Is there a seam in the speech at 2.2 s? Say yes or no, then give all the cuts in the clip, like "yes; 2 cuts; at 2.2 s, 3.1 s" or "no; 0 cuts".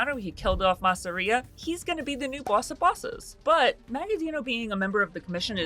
no; 1 cut; at 3.8 s